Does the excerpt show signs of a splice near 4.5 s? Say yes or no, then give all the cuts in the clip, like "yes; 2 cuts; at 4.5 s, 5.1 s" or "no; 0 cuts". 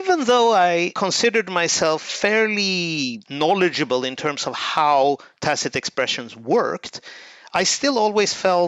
no; 2 cuts; at 0.9 s, 3.2 s